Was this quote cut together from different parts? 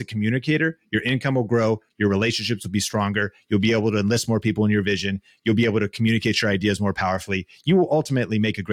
no; 0 cuts

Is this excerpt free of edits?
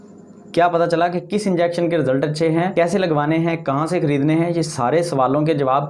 no; 1 cut; at 2.7 s

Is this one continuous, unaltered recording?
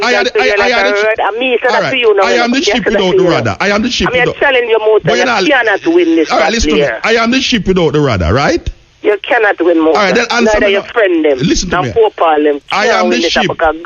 yes; 0 cuts

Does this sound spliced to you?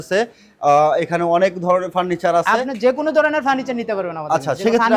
no; 0 cuts

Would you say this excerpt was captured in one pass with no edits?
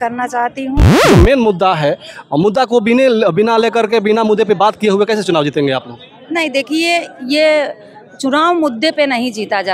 no; 1 cut; at 0.9 s

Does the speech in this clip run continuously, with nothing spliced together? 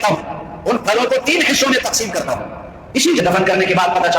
no; 1 cut; at 3.2 s

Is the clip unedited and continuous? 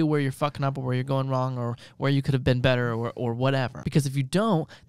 no; 1 cut; at 3.8 s

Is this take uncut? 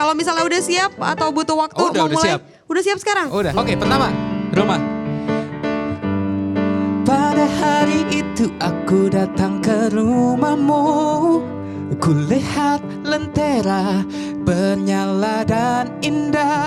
no; 2 cuts; at 3.6 s, 11.5 s

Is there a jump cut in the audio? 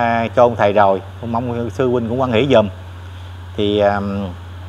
no; 0 cuts

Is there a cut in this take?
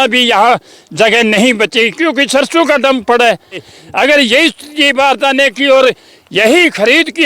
yes; 1 cut; at 3.7 s

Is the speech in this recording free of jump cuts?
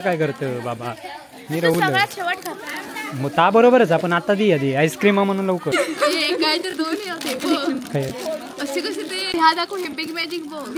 no; 2 cuts; at 5.7 s, 9.3 s

